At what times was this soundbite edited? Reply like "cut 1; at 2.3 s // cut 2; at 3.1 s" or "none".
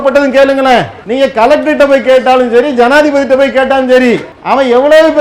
cut 1; at 1.0 s // cut 2; at 4.3 s

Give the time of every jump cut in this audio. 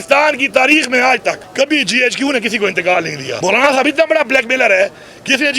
cut 1; at 1.4 s // cut 2; at 3.2 s

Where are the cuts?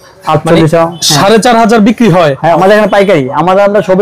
cut 1; at 2.6 s

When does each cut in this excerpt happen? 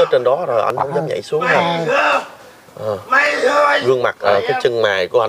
cut 1; at 4.2 s

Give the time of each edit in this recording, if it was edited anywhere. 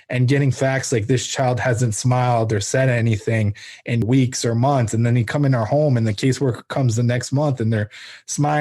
cut 1; at 4.0 s

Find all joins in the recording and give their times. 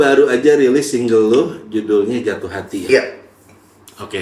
none

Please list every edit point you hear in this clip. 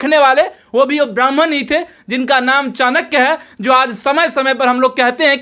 none

